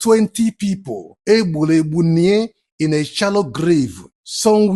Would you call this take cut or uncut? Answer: uncut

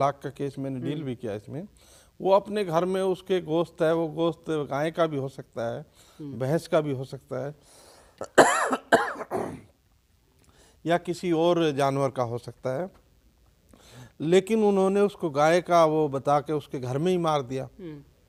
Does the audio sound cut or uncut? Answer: uncut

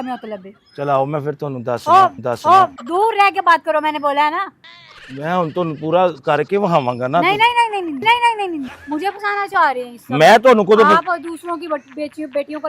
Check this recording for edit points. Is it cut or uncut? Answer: cut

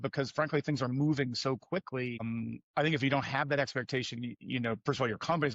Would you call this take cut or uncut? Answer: cut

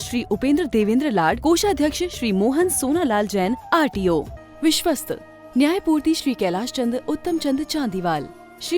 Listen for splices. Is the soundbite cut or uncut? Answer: cut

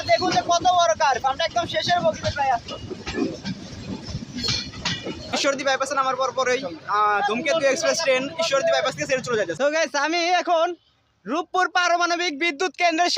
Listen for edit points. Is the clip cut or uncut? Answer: cut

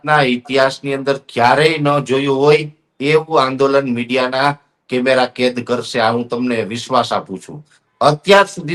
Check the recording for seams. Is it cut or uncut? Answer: uncut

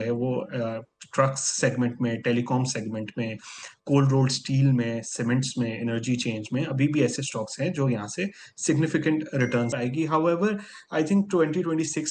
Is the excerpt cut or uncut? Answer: cut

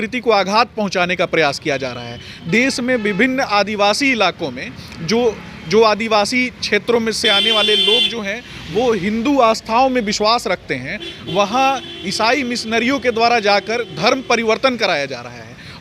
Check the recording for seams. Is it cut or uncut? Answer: uncut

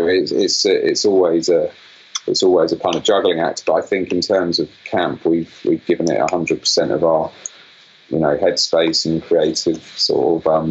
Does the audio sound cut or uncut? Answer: uncut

